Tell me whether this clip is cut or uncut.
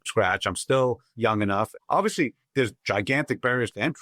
cut